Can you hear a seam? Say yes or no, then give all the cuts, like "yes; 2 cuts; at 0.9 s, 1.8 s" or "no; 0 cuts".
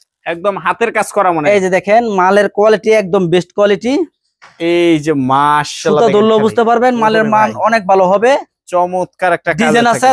no; 0 cuts